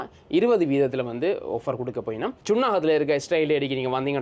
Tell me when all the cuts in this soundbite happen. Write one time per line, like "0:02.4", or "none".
0:02.4

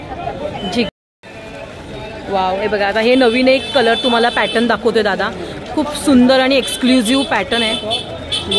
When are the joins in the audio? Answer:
0:00.9

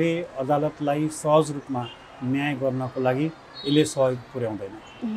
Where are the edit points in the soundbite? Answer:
none

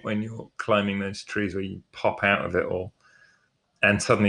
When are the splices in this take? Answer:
none

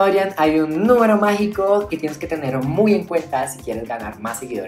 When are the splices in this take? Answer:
none

